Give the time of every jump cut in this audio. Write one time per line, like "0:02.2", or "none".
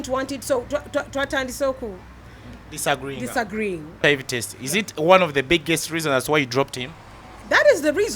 0:04.0